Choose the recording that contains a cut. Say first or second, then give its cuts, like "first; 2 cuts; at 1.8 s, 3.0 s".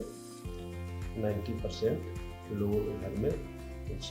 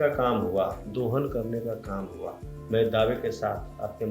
second; 1 cut; at 2.5 s